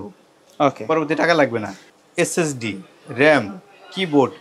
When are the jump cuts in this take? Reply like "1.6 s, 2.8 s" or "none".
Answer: 1.9 s